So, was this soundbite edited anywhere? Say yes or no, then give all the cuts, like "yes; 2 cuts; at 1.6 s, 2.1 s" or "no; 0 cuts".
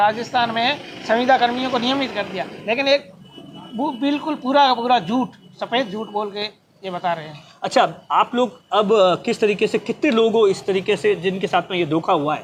no; 0 cuts